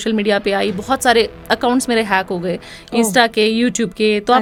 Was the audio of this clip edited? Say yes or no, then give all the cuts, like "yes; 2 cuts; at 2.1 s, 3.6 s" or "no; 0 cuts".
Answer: no; 0 cuts